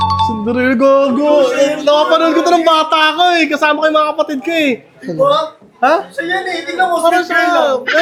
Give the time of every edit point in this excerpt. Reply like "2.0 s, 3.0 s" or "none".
none